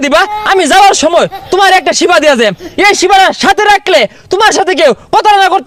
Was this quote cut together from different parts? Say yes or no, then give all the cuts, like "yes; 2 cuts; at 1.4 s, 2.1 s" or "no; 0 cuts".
no; 0 cuts